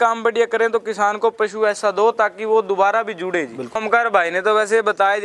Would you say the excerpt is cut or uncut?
cut